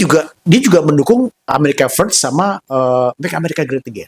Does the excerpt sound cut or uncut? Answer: cut